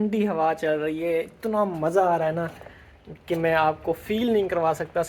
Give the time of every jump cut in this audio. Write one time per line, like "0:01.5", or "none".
none